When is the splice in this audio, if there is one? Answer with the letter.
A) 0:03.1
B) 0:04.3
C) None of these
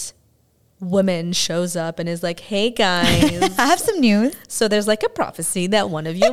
C